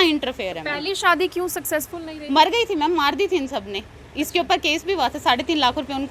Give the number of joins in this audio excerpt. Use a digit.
0